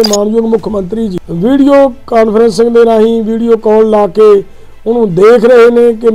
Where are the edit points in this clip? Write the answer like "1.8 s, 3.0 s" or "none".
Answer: 1.2 s